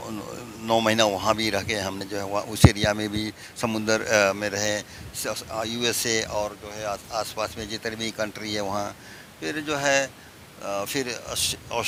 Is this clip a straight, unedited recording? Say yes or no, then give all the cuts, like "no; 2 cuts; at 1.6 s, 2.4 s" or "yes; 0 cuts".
yes; 0 cuts